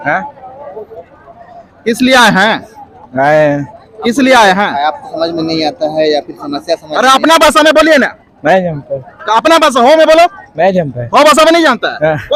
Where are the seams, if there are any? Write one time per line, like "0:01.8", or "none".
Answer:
none